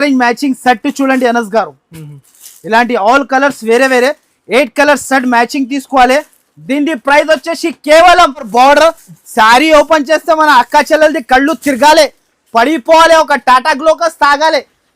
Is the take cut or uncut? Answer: cut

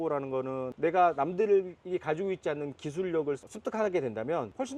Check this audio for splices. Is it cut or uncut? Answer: uncut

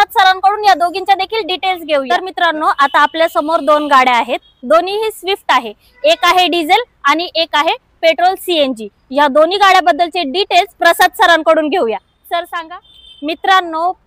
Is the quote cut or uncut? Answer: cut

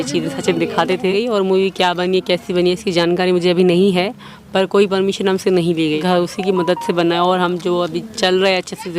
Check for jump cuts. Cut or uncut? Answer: cut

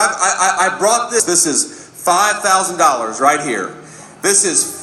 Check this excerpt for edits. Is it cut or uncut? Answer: cut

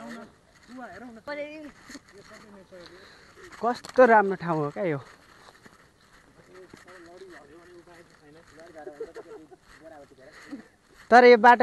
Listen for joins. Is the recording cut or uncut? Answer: cut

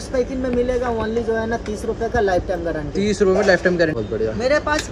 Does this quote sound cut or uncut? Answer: cut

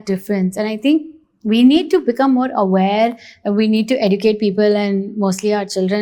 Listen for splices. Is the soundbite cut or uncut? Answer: uncut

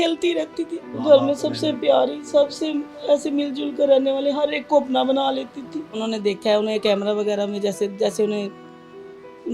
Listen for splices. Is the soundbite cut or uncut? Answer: cut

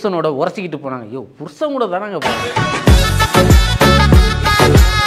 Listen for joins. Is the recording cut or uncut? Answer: cut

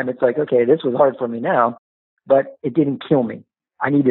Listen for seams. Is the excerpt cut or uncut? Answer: uncut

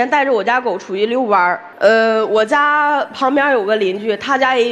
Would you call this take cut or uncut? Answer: cut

